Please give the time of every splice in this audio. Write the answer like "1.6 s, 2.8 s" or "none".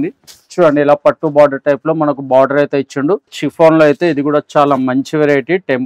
3.4 s